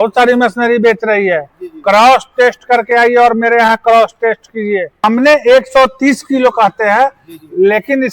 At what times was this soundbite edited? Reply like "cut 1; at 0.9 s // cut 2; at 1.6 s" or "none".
cut 1; at 5.0 s